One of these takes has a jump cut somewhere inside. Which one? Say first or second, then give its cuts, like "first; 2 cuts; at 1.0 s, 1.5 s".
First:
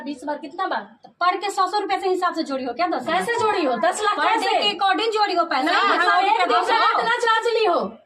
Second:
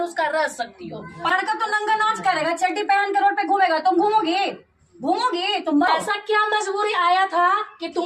second; 2 cuts; at 1.3 s, 5.9 s